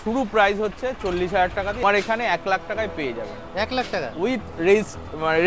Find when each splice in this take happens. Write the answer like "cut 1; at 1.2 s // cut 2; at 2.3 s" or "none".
cut 1; at 1.8 s